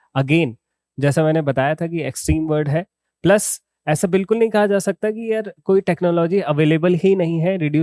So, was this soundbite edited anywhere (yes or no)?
no